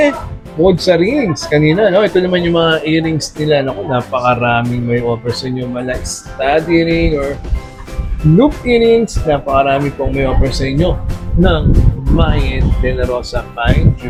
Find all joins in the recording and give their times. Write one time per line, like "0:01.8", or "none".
none